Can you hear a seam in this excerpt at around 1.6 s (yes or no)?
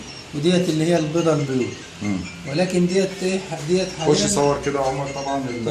no